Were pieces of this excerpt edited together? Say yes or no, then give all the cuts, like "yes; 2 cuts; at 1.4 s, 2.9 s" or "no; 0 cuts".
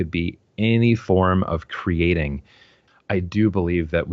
yes; 1 cut; at 2.8 s